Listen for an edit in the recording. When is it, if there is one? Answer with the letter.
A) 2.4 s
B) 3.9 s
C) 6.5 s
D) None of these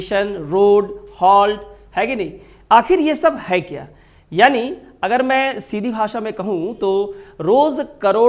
D